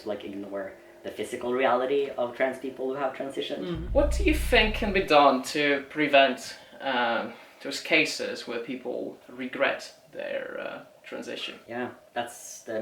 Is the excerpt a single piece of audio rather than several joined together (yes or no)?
no